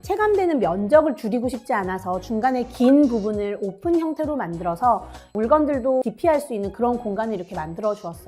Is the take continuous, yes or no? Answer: no